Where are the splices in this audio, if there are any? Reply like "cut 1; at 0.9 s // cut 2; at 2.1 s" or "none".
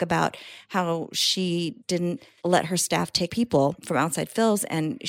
cut 1; at 2.1 s // cut 2; at 3.3 s